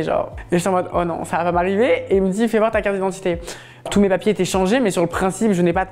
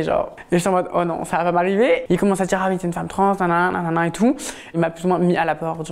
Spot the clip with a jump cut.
second; 2 cuts; at 2.0 s, 4.7 s

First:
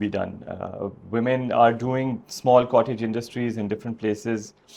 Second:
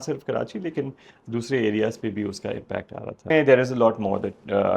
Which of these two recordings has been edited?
second; 1 cut; at 3.2 s

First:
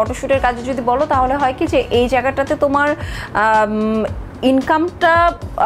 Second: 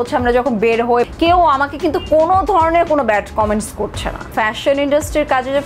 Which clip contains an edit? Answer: second; 2 cuts; at 1.1 s, 4.3 s

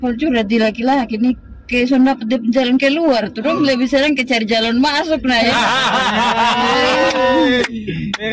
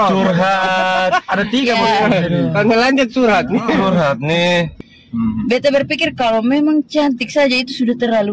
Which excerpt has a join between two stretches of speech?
second; 1 cut; at 4.7 s

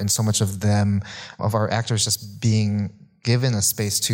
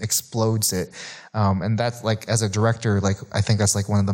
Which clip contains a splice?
first; 1 cut; at 1.4 s

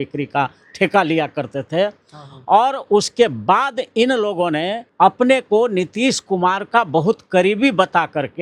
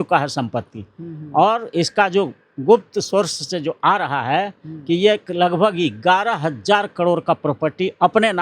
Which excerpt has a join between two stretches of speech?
first; 1 cut; at 4.8 s

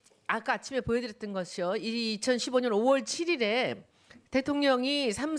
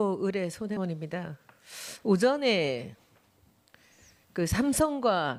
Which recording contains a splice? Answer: first; 1 cut; at 3.9 s

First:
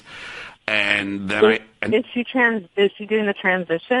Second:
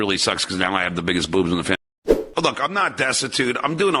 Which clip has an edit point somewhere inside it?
second; 1 cut; at 2.2 s

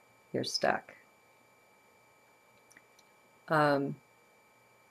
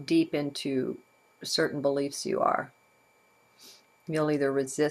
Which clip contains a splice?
second; 1 cut; at 1.5 s

